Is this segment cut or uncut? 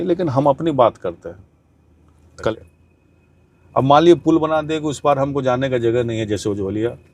cut